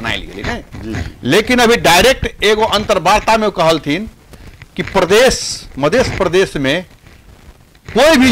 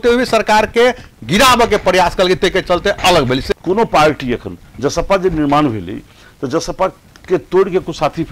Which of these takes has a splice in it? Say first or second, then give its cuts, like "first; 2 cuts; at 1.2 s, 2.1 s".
second; 1 cut; at 3.5 s